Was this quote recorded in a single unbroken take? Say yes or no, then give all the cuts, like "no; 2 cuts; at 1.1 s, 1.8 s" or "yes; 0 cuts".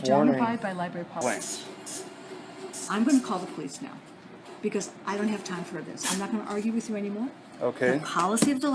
no; 1 cut; at 1.2 s